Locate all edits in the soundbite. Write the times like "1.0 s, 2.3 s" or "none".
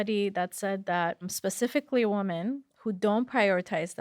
1.3 s